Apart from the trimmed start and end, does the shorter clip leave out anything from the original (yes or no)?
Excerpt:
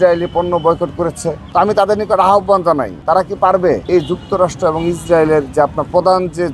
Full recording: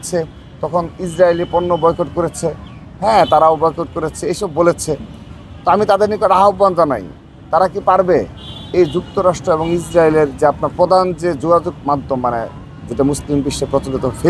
yes